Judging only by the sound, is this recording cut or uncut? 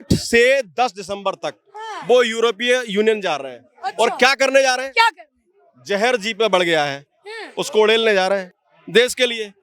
uncut